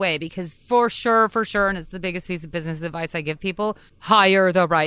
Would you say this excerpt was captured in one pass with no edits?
no; 1 cut; at 3.4 s

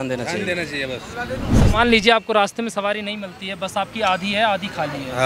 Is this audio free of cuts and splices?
no; 1 cut; at 1.6 s

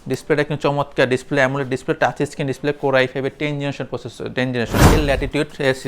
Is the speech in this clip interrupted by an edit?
yes; 1 cut; at 4.9 s

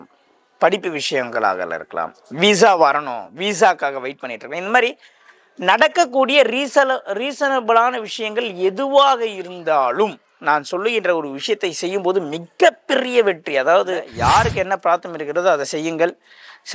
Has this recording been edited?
yes; 1 cut; at 14.1 s

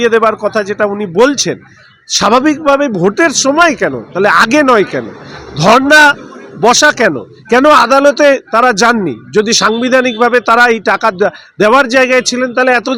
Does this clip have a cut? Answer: no; 0 cuts

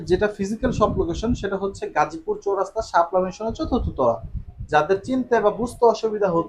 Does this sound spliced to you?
no; 0 cuts

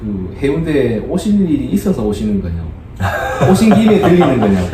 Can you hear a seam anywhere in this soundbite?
no; 0 cuts

